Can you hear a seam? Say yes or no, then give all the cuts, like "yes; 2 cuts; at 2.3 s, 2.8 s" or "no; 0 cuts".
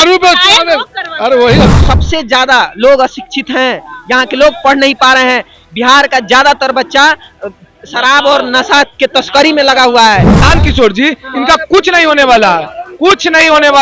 yes; 2 cuts; at 1.8 s, 10.4 s